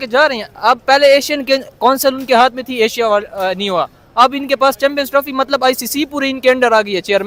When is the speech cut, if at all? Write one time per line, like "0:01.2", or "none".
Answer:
none